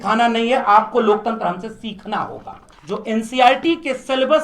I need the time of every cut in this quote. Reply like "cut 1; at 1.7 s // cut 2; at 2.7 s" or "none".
cut 1; at 2.7 s